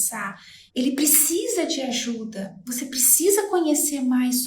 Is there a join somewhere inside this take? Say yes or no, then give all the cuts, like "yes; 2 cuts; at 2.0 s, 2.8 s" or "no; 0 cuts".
no; 0 cuts